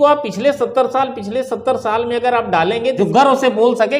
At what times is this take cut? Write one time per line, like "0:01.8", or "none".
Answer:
0:03.0